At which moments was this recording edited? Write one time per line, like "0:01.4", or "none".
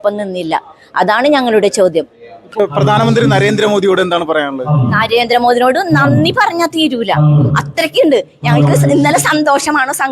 0:02.6